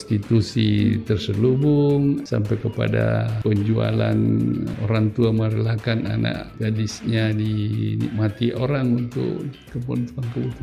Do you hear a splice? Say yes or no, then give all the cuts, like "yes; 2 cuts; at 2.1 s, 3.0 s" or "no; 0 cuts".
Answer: yes; 4 cuts; at 2.2 s, 3.3 s, 4.8 s, 6.5 s